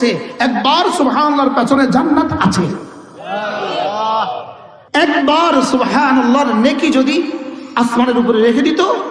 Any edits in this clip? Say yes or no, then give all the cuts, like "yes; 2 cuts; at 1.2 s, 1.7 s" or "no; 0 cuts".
no; 0 cuts